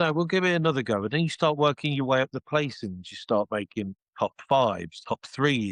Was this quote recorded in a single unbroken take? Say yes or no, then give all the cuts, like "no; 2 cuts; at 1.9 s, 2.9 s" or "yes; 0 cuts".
yes; 0 cuts